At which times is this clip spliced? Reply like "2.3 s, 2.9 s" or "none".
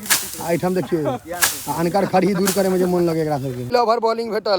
3.6 s